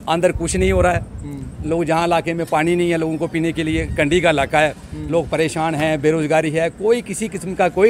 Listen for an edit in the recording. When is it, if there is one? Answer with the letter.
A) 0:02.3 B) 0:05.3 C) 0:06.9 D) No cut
D